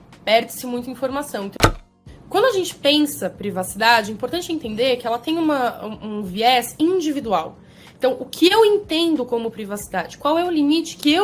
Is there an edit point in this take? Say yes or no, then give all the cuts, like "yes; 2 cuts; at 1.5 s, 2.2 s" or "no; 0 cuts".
yes; 1 cut; at 1.6 s